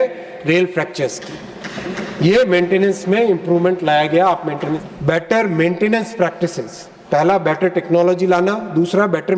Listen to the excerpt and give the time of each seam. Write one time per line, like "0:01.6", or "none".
0:04.8

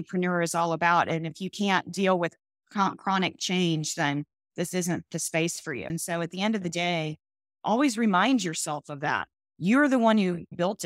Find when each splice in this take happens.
0:05.8

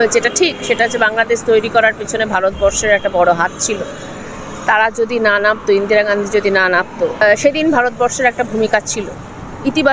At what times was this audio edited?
none

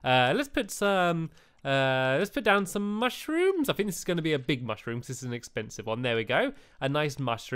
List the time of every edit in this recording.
0:03.4

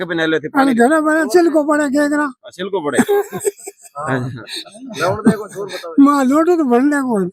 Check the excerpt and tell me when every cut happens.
none

